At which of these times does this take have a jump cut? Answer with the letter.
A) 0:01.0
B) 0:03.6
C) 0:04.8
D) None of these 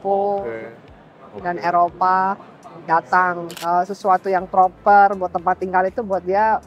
B